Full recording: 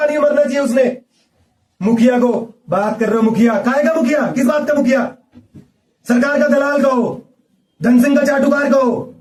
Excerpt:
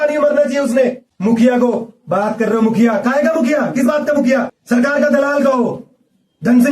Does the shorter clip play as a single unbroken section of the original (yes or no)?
no